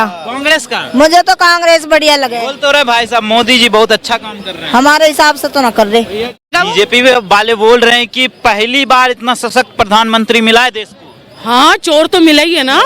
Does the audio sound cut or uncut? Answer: cut